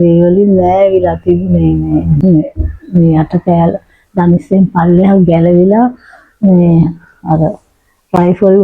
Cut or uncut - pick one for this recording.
cut